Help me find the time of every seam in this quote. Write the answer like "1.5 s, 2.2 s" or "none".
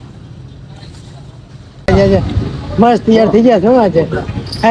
1.9 s